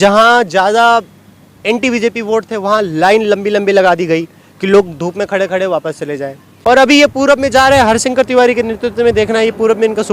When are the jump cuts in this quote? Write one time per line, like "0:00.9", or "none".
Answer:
0:06.5

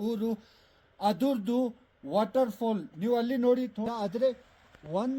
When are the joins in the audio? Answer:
0:03.9

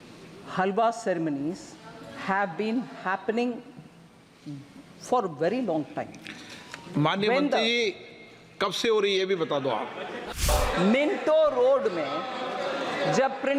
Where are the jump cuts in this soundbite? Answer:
0:10.3

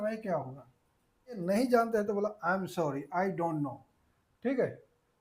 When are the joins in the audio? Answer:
0:01.4

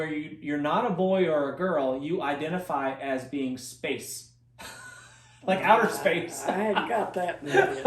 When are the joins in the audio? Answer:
none

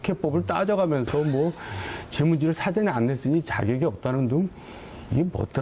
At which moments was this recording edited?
0:03.8

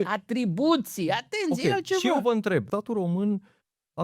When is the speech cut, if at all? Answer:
0:02.7

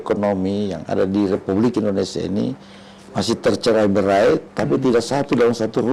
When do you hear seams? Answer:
none

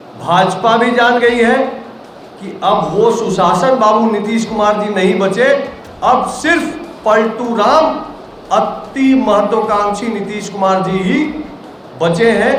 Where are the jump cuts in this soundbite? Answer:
none

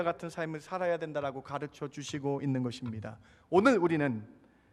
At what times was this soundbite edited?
none

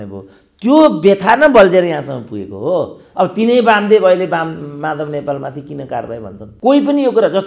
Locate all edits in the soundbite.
0:06.4

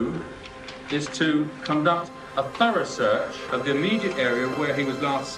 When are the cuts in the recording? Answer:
0:03.4
0:04.5

